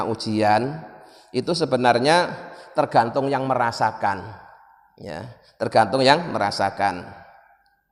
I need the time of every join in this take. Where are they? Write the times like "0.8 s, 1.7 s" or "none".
none